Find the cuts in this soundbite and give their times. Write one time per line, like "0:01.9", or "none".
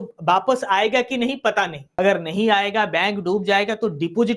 0:01.8